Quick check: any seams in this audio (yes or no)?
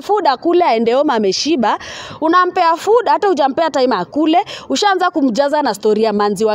no